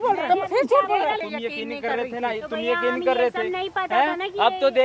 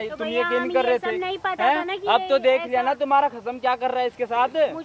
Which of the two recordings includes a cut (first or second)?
first